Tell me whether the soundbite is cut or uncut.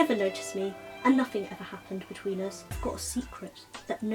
cut